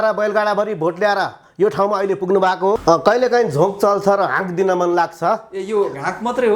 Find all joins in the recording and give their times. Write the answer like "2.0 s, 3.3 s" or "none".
2.8 s